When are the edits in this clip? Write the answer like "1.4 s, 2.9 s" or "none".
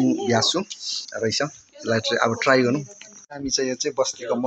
1.0 s, 3.3 s